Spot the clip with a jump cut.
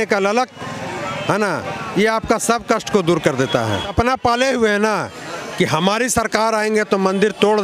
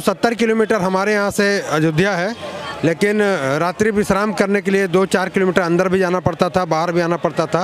first; 1 cut; at 3.9 s

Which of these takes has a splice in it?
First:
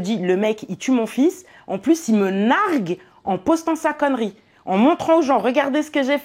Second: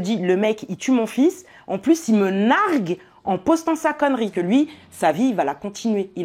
second; 1 cut; at 4.3 s

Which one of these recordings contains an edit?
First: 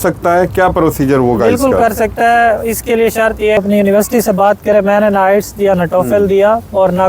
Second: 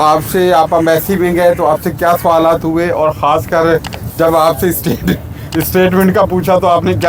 first; 1 cut; at 3.6 s

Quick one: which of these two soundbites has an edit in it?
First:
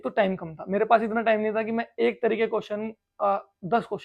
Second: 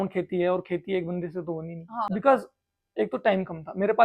second; 1 cut; at 2.1 s

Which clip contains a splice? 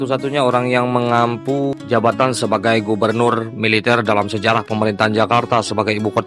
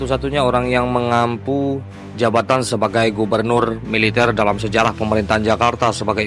first; 1 cut; at 1.8 s

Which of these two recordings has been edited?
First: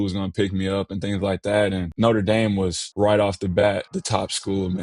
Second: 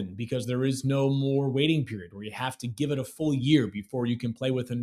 first; 3 cuts; at 1.9 s, 2.8 s, 3.9 s

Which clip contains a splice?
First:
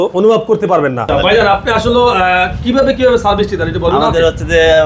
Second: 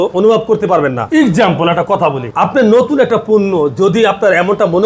first; 1 cut; at 1.1 s

